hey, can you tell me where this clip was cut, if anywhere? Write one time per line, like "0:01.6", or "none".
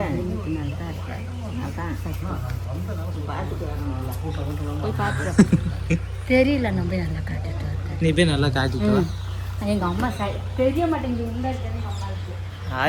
none